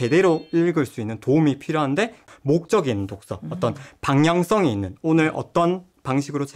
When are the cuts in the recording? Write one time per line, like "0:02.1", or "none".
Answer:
0:02.3

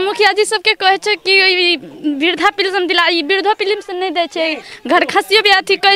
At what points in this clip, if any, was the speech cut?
none

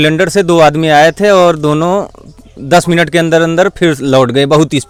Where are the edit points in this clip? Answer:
none

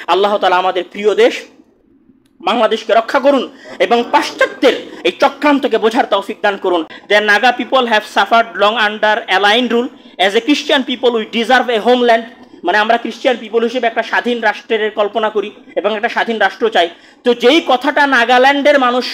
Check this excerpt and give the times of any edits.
0:06.9

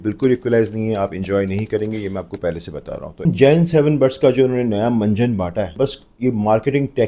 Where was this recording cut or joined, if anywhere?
0:03.2
0:05.7

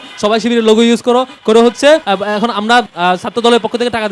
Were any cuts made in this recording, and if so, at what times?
0:02.0
0:02.9

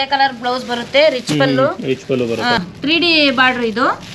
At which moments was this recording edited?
0:02.6

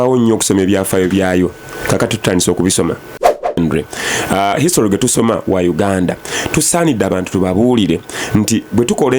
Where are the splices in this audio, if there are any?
0:03.6

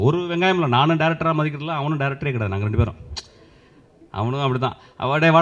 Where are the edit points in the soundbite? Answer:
none

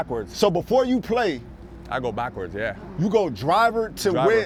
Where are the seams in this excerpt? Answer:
none

